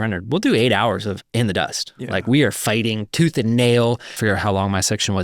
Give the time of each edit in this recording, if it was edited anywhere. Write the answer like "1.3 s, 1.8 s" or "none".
4.1 s